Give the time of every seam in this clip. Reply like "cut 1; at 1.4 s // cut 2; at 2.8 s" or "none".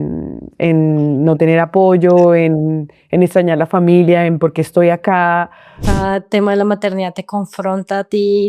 cut 1; at 5.8 s